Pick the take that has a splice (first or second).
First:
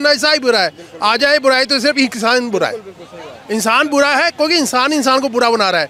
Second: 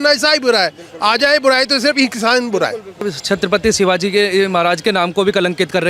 second